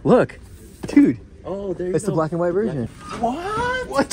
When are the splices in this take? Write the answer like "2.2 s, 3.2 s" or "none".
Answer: 3.0 s